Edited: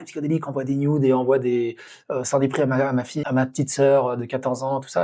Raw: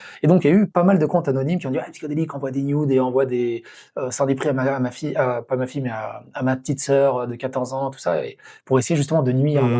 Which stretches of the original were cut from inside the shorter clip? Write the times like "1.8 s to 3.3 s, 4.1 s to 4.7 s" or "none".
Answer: 5.0 s to 6.3 s